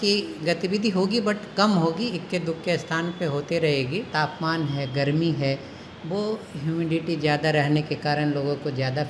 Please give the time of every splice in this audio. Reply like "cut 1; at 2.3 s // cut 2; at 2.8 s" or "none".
cut 1; at 4.1 s